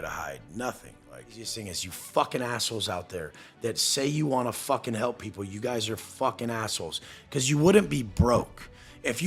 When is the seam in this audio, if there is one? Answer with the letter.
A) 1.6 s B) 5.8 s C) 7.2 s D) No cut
A